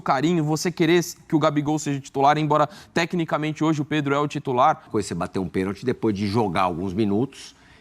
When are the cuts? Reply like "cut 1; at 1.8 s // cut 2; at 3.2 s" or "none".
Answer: cut 1; at 4.8 s